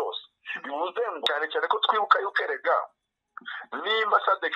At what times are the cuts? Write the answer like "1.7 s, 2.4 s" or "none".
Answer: 1.2 s